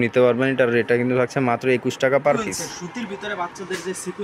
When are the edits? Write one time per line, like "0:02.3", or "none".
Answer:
0:02.4